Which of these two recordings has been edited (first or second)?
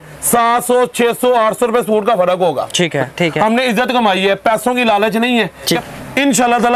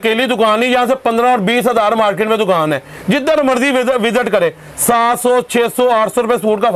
first